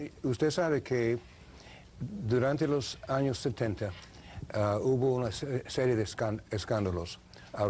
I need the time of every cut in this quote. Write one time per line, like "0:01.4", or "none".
0:03.4